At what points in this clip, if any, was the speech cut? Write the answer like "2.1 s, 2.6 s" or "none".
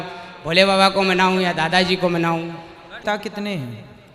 3.0 s